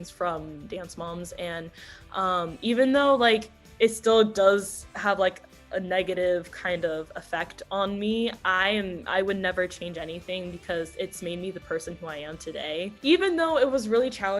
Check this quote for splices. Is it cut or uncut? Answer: uncut